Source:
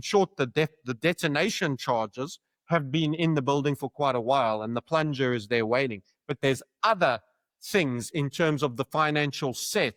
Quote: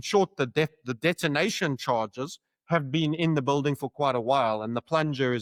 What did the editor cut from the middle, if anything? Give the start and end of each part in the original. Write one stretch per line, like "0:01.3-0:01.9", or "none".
none